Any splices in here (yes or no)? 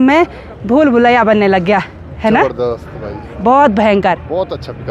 no